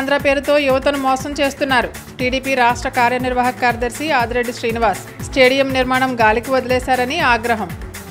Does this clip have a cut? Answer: no; 0 cuts

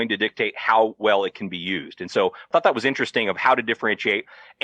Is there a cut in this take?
yes; 1 cut; at 2.5 s

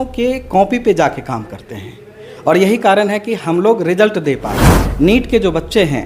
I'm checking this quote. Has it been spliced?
yes; 1 cut; at 4.8 s

